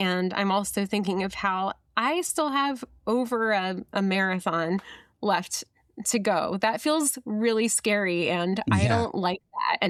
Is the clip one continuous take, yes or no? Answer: yes